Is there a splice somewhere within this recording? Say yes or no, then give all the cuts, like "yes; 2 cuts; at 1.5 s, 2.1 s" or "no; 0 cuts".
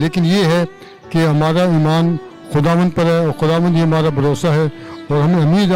no; 0 cuts